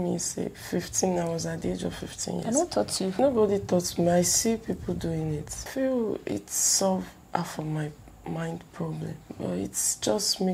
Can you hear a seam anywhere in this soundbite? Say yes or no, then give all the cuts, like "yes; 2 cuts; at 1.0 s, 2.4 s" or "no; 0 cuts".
yes; 3 cuts; at 3.1 s, 5.6 s, 9.2 s